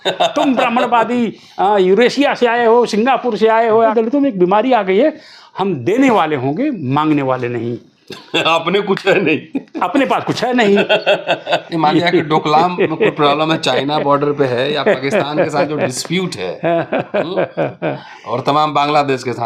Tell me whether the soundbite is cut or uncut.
cut